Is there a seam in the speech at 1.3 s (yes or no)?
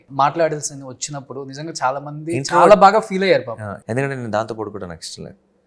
no